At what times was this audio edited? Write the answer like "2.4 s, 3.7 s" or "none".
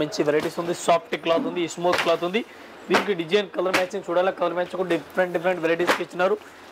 none